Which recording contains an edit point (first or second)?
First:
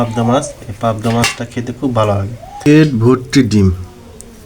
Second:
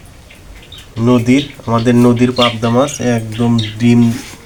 first